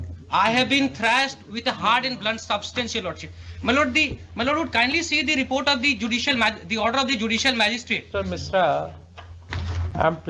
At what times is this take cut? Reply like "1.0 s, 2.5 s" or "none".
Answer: none